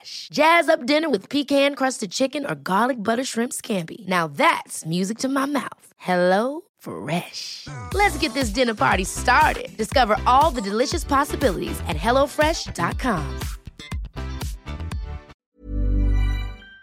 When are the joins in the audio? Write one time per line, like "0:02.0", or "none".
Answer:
0:15.3